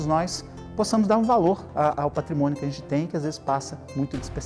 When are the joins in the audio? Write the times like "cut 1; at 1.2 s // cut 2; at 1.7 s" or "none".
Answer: none